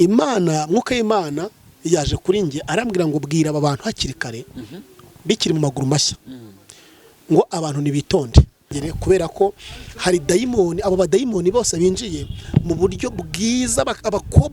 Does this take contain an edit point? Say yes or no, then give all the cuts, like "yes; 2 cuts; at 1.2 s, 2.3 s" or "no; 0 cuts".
yes; 1 cut; at 8.8 s